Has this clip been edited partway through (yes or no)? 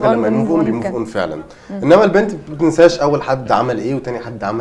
no